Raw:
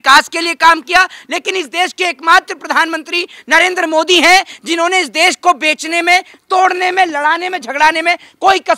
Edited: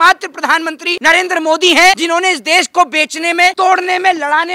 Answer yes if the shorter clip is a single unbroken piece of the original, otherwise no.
no